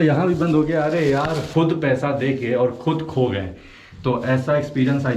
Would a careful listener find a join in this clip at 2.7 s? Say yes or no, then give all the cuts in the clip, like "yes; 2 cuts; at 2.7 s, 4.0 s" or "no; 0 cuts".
no; 1 cut; at 1.4 s